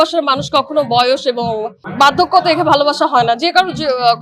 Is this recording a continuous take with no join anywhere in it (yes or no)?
no